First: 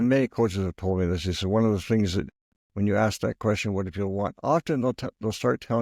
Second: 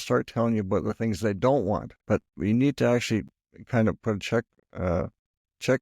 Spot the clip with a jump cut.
second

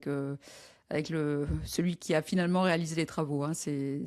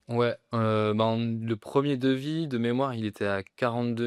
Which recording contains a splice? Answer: first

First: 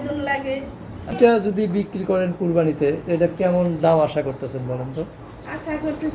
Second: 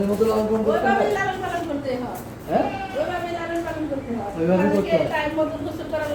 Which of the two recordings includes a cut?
first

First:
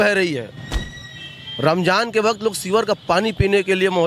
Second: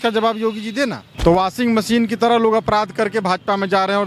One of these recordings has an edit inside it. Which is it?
second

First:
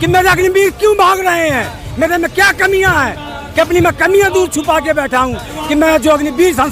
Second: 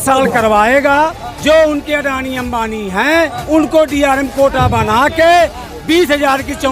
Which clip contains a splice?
second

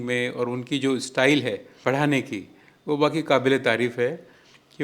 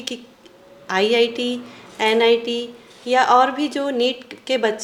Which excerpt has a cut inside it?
first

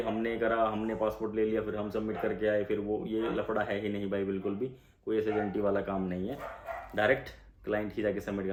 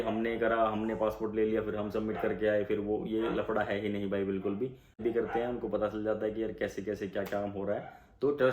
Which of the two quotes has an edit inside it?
second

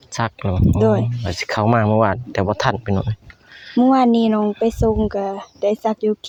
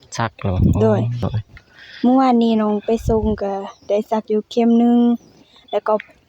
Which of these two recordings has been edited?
second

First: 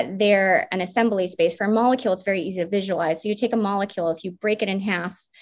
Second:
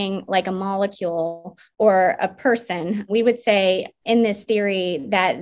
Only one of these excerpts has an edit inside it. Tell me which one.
second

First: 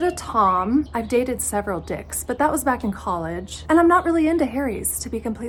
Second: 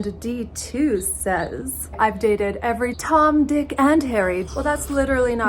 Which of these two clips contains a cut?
second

